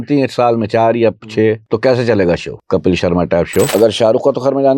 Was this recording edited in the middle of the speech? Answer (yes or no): yes